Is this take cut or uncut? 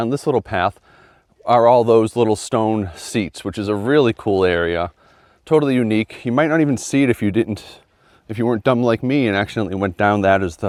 uncut